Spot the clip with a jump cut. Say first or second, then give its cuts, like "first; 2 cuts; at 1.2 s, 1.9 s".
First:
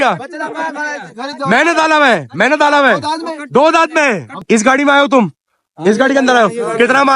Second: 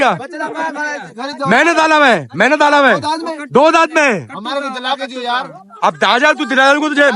first; 1 cut; at 4.3 s